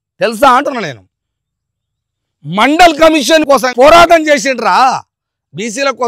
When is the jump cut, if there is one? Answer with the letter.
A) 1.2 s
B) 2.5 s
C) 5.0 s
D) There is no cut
D